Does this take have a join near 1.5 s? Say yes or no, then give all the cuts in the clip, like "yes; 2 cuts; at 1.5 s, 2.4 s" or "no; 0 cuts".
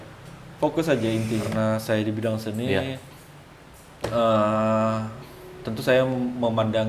yes; 1 cut; at 1.5 s